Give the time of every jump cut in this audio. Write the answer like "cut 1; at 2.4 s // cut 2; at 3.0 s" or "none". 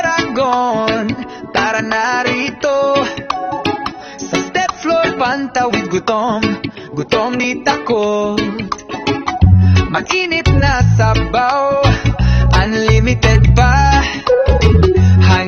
cut 1; at 7.4 s